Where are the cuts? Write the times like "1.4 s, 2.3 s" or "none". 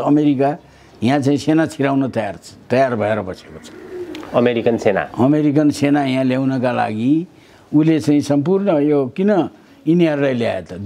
none

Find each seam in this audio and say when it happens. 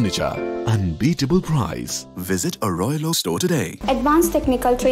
3.7 s

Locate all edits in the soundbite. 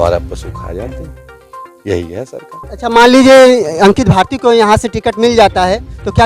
2.6 s

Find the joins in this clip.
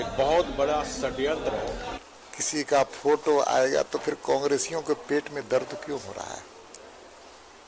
2.0 s

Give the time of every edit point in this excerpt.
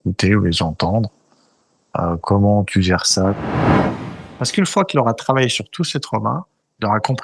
3.9 s

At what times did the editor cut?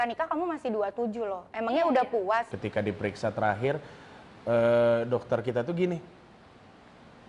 2.5 s

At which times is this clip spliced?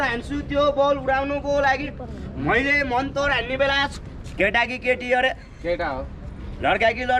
3.9 s

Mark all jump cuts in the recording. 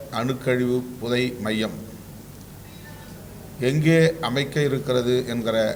none

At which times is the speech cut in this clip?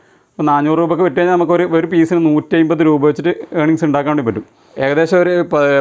4.9 s

